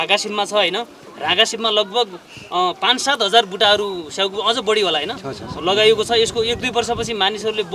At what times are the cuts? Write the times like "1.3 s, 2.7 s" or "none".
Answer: none